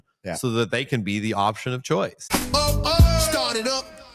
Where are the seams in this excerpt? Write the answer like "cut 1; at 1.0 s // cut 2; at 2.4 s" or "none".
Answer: cut 1; at 2.3 s